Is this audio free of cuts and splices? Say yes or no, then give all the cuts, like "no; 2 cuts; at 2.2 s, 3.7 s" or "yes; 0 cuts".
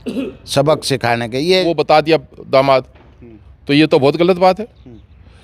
no; 1 cut; at 1.6 s